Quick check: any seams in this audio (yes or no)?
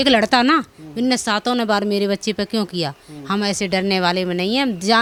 no